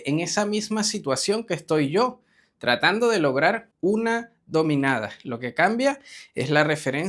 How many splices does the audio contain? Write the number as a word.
one